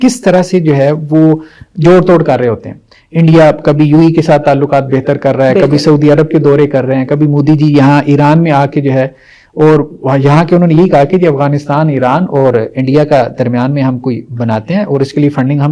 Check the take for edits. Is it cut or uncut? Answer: uncut